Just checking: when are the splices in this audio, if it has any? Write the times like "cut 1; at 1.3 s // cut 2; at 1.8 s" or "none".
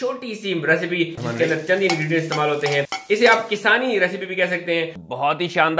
cut 1; at 1.2 s // cut 2; at 4.9 s